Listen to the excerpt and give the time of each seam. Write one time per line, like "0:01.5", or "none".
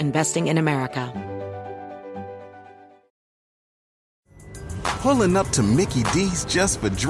0:01.1

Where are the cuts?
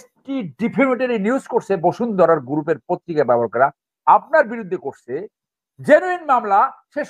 none

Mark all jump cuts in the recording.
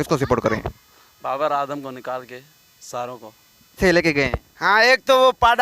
0:03.8

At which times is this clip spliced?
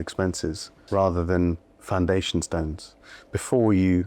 0:00.8
0:02.9

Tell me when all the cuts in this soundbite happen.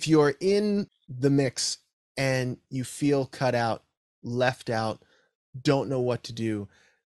0:01.0

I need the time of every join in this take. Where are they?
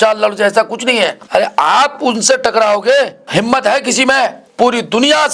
0:01.2
0:03.2
0:04.4

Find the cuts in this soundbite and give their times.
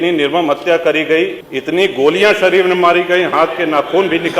0:01.5

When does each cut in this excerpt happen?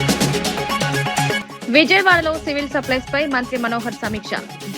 0:01.4

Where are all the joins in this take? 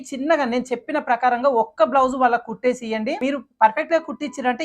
0:03.2

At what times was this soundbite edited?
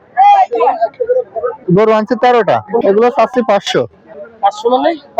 0:01.6

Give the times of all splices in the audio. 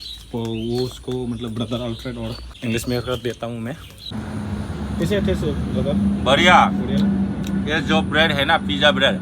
0:02.5
0:04.1

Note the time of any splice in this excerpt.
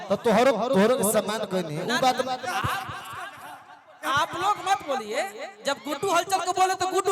none

